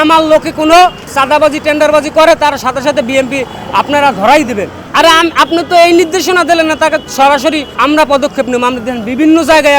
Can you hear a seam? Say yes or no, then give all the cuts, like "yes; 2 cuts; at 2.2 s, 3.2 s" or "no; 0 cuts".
yes; 3 cuts; at 1.1 s, 4.7 s, 7.7 s